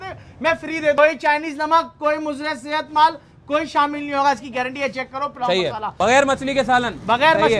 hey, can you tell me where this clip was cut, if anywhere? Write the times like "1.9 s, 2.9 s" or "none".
1.0 s, 5.9 s